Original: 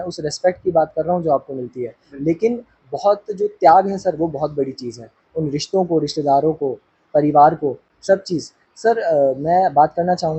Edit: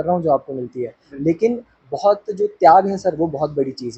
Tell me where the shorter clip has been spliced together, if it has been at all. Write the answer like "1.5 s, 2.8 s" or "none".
none